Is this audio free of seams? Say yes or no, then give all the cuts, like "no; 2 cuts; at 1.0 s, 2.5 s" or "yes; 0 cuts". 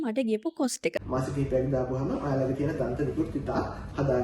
no; 1 cut; at 1.0 s